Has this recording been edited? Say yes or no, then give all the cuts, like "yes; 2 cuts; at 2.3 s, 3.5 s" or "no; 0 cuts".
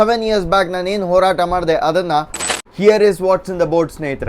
yes; 1 cut; at 2.5 s